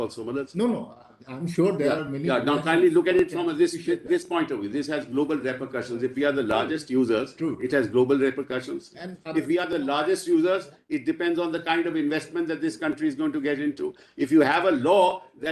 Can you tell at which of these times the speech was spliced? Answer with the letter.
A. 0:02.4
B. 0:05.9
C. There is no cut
C